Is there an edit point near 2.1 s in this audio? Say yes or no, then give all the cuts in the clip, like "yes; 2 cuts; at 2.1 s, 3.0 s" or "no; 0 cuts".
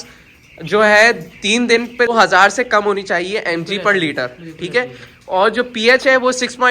yes; 1 cut; at 2.1 s